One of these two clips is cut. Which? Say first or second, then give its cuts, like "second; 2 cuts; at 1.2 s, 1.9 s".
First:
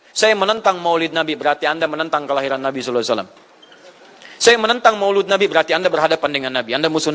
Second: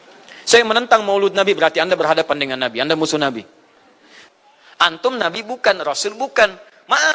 second; 1 cut; at 4.1 s